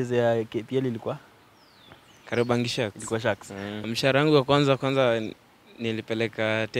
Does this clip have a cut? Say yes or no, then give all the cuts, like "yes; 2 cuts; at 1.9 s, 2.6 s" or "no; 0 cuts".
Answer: yes; 1 cut; at 3.8 s